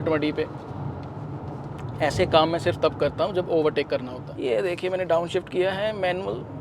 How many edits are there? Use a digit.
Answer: 1